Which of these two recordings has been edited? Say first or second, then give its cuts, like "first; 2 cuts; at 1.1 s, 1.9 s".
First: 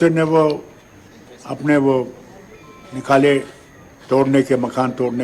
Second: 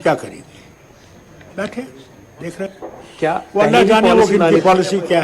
second; 1 cut; at 2.7 s